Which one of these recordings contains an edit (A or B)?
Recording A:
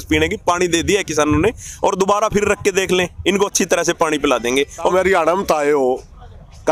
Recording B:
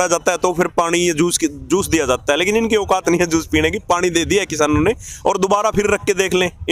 A